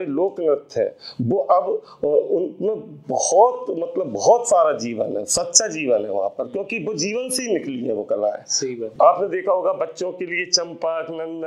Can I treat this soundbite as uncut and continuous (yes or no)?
no